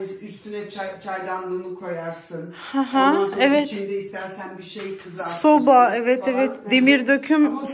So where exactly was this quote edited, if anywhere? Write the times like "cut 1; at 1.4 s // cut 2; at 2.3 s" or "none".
none